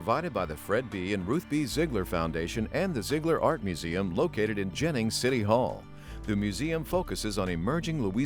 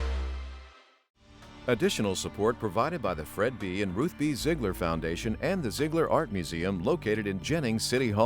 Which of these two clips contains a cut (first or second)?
second